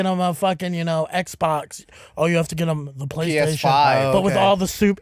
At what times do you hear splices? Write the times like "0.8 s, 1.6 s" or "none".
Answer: none